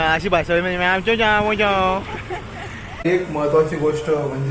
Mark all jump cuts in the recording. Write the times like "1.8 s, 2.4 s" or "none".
3.0 s